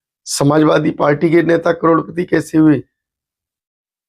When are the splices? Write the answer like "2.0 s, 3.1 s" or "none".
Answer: none